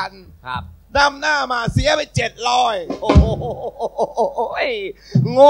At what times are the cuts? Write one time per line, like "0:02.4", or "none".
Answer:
none